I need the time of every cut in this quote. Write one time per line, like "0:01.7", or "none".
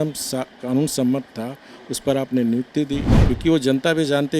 0:03.1